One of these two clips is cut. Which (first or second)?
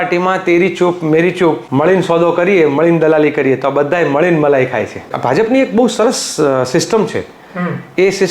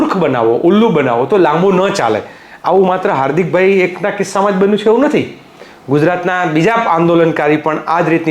first